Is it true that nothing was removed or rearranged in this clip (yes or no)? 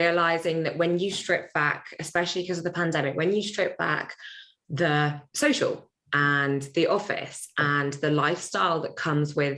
no